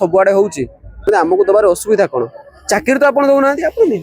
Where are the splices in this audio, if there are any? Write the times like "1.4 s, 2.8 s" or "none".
1.0 s